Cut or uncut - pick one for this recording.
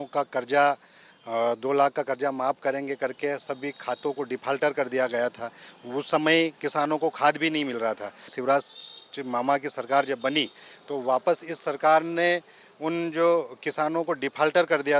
cut